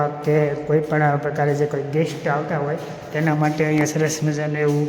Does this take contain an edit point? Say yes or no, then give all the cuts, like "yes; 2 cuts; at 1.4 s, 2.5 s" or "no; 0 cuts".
no; 0 cuts